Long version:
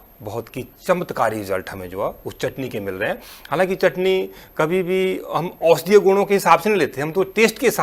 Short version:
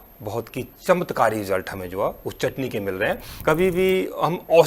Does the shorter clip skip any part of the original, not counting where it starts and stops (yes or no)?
yes